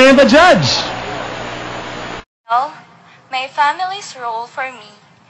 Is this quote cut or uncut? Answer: uncut